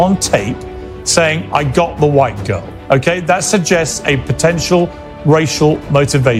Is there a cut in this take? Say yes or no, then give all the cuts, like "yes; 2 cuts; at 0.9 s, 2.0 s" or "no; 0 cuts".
no; 0 cuts